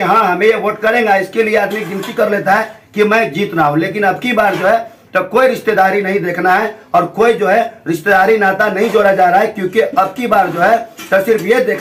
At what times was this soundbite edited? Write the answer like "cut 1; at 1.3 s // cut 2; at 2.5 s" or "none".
none